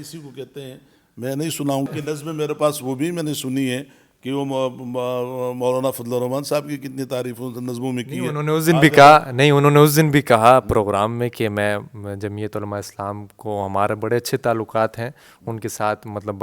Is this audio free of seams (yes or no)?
no